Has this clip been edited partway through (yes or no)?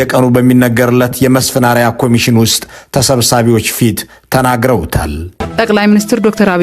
yes